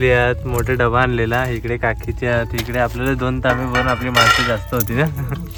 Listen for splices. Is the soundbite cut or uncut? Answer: uncut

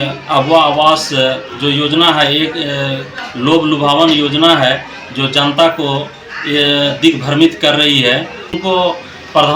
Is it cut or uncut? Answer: cut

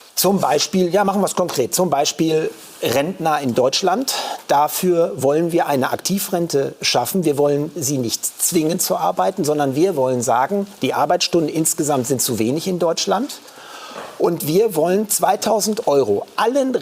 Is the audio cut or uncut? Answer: uncut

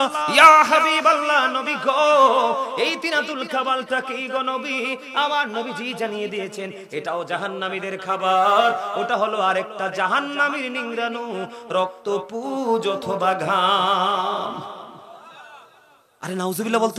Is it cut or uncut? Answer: uncut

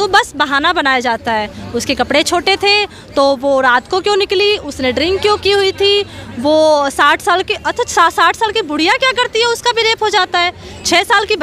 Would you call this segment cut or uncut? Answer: uncut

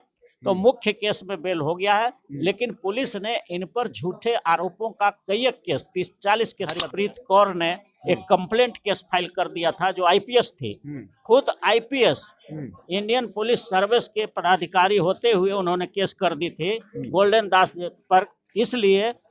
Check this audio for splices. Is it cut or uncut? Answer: cut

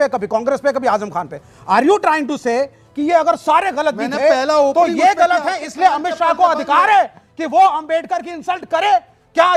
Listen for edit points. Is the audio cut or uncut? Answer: uncut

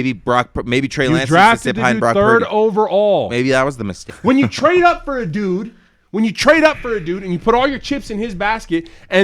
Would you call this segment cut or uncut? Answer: cut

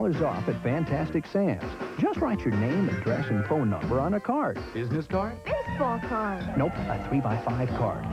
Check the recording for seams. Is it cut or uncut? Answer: uncut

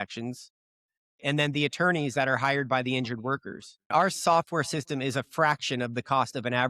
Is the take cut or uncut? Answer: cut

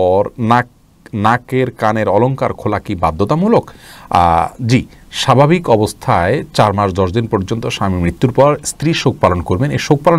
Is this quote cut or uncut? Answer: uncut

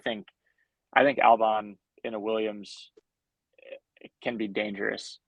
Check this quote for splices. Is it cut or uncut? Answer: uncut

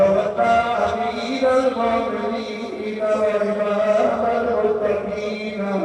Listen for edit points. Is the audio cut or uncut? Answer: uncut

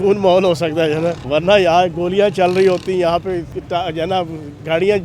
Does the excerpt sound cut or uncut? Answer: cut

